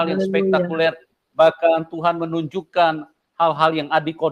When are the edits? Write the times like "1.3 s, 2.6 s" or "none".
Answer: none